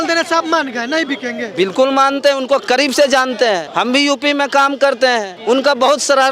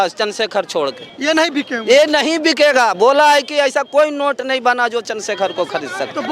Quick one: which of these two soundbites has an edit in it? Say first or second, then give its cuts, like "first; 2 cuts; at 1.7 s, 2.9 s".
first; 2 cuts; at 3.7 s, 5.3 s